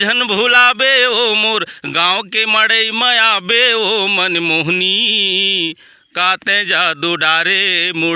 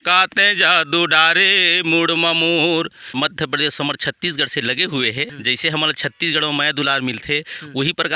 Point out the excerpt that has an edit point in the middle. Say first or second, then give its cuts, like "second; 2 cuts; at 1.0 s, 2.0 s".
second; 2 cuts; at 3.0 s, 5.3 s